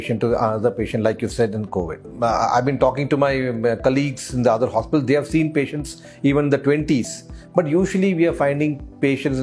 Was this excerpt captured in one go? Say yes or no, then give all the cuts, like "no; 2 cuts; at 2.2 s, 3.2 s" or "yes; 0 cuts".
yes; 0 cuts